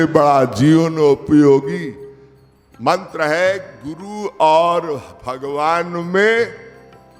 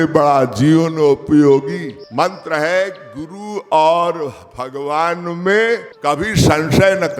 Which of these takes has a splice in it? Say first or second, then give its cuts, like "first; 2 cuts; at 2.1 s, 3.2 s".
second; 2 cuts; at 2.0 s, 5.9 s